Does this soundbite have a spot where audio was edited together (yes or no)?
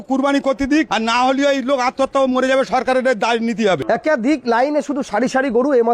yes